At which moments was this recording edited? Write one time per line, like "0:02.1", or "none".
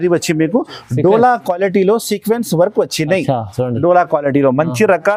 none